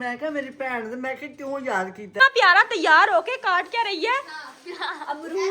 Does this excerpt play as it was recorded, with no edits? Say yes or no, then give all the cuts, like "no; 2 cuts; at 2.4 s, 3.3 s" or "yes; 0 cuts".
no; 1 cut; at 2.2 s